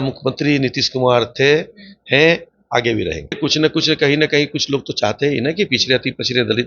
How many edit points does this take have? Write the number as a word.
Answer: one